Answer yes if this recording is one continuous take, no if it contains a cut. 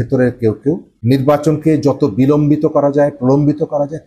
no